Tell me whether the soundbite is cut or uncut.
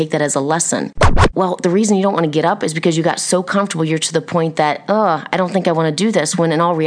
cut